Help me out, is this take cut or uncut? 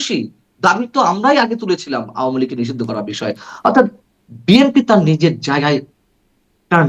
uncut